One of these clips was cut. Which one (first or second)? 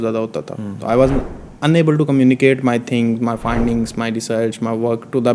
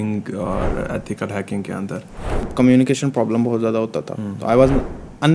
second